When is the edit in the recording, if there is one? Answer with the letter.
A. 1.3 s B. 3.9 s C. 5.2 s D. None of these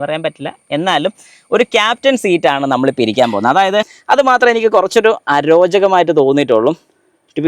B